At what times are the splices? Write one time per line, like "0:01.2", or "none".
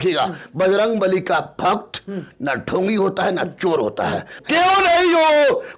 0:04.4